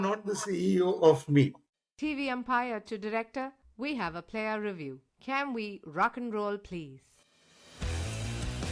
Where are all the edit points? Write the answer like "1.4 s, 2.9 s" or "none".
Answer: 1.7 s